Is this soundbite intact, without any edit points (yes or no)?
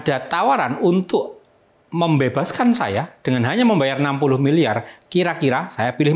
yes